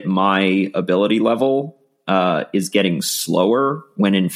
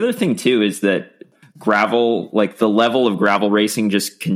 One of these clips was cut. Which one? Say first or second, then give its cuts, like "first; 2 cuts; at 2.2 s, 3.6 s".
second; 1 cut; at 1.3 s